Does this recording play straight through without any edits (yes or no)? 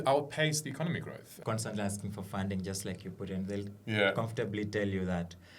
no